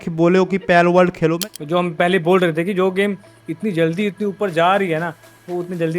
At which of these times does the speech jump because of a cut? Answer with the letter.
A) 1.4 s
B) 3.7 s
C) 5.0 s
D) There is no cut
A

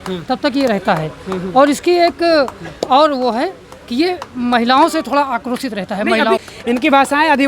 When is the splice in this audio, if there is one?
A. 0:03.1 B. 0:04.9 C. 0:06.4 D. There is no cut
C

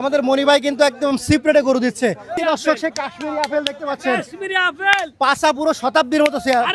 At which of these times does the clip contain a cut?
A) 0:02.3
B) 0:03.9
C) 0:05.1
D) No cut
A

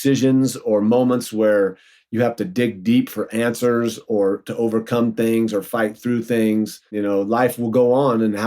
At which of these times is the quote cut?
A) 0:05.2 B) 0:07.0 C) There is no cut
B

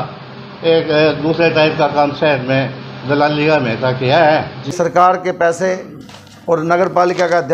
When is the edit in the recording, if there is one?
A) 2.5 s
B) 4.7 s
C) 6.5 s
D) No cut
B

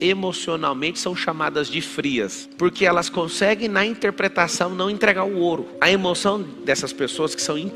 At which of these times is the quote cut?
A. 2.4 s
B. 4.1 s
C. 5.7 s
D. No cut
A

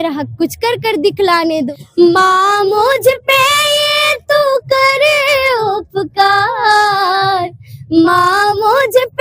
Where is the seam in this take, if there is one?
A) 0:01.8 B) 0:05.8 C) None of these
A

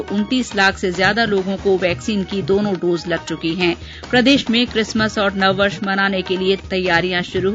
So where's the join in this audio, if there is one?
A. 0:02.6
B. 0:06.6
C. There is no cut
B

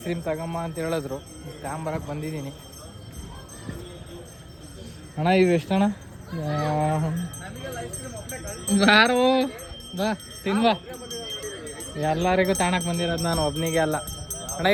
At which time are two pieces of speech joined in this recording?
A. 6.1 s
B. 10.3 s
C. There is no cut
C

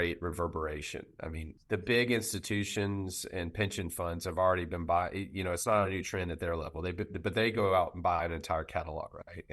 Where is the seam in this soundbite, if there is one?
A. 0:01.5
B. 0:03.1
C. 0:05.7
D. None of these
A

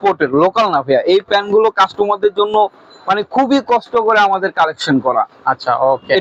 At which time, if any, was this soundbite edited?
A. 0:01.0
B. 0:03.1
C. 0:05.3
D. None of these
D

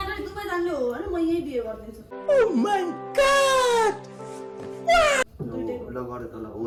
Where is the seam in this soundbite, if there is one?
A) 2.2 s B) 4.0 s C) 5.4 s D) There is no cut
D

